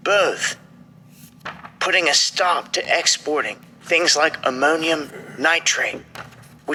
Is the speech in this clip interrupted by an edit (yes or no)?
no